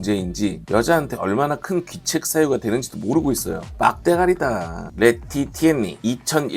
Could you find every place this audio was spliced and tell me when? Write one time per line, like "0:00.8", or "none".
0:03.7
0:04.8